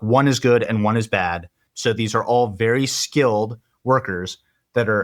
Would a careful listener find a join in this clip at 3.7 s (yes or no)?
no